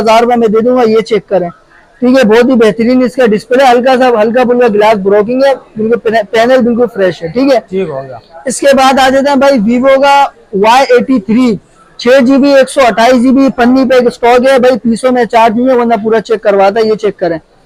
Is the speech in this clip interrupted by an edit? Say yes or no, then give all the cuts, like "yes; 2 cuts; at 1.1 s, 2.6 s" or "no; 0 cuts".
no; 0 cuts